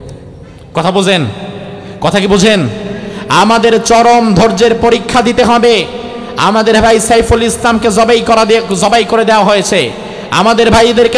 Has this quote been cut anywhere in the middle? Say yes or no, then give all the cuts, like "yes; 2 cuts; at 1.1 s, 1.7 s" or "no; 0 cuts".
no; 0 cuts